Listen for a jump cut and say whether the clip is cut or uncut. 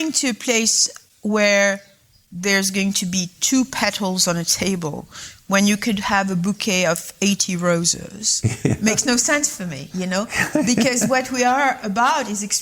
uncut